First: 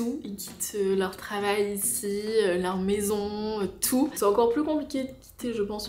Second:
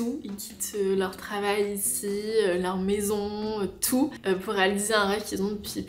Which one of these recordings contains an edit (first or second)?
first